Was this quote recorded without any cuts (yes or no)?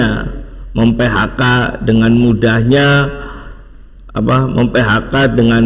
yes